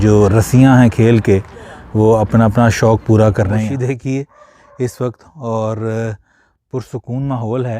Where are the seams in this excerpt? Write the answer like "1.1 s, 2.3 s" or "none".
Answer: 3.5 s